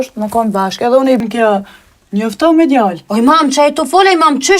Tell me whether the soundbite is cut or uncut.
cut